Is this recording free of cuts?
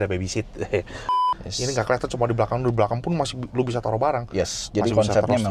no; 1 cut; at 1.0 s

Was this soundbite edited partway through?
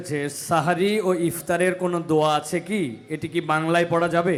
no; 0 cuts

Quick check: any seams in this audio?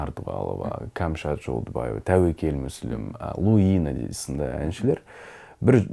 no; 0 cuts

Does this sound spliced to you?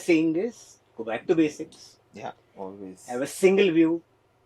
no; 0 cuts

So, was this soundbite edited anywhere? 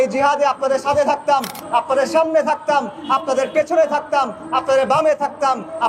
no; 0 cuts

